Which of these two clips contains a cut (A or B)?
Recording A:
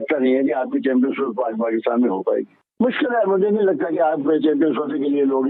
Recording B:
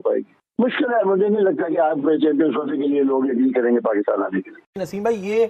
B